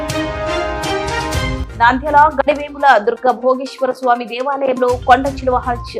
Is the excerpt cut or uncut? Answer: uncut